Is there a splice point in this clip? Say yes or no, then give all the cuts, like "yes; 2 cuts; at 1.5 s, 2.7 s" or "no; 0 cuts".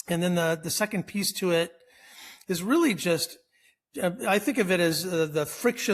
no; 0 cuts